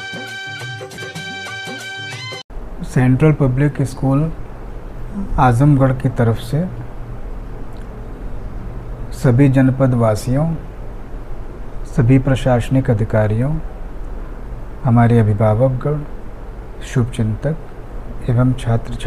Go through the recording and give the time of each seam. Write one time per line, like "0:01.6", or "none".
0:02.3